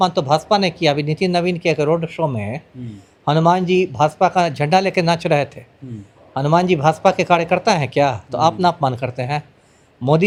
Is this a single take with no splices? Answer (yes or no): yes